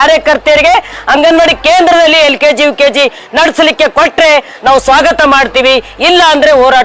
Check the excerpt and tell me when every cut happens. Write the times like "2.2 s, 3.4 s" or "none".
none